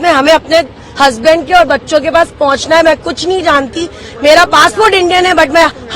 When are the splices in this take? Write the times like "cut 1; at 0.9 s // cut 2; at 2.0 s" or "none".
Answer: none